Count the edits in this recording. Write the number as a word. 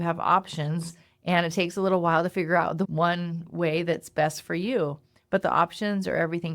one